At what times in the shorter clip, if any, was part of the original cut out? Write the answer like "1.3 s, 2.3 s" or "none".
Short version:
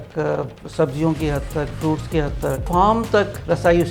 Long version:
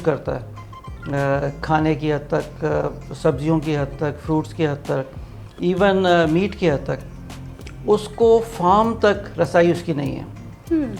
2.6 s